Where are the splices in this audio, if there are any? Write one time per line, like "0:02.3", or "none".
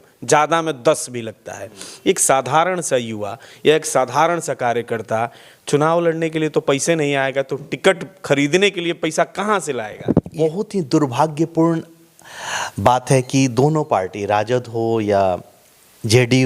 0:10.4